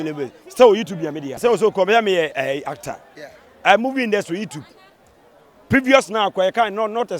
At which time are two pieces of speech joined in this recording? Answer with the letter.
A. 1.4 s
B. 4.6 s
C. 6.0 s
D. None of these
A